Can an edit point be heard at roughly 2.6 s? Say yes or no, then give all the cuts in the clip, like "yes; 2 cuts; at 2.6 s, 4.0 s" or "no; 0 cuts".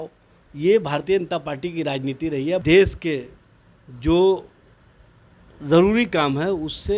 yes; 1 cut; at 2.6 s